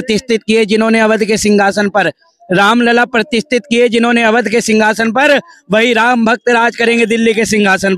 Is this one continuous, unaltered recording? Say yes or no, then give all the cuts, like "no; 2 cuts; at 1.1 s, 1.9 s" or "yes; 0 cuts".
yes; 0 cuts